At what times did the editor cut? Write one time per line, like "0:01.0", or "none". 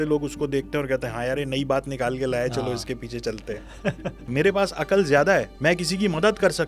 0:04.2
0:05.5

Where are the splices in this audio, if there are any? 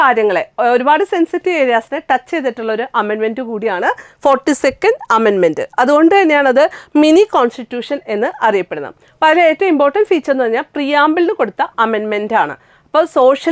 none

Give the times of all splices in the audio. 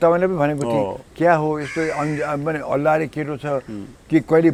none

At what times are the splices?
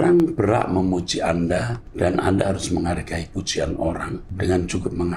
0:01.8
0:04.3

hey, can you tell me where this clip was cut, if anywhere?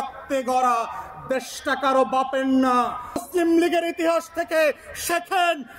0:03.2

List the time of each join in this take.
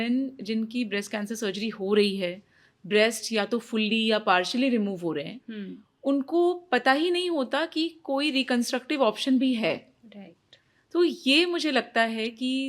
none

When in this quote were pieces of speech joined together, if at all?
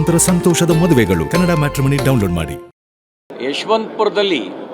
0:03.2

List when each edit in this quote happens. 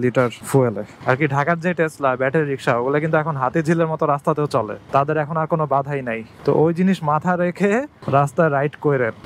0:00.9

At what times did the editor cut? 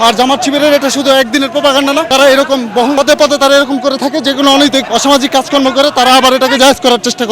0:02.1
0:03.0
0:04.9

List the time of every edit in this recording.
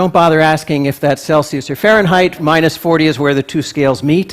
0:02.4

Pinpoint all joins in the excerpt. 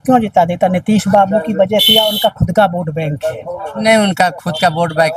none

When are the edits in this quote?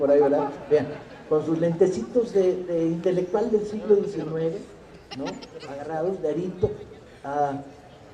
0:02.2

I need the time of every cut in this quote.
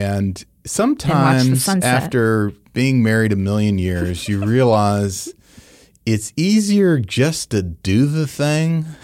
0:02.6

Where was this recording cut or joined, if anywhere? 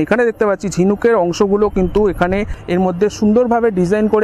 0:02.5

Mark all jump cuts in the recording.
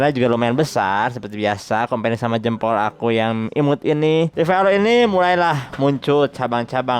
0:04.3

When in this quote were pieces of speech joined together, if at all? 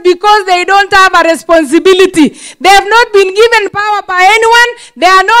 none

